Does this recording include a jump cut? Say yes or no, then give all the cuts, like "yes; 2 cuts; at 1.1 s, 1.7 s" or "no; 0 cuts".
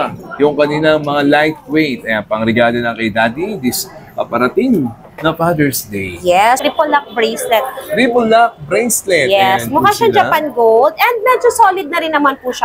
yes; 1 cut; at 6.6 s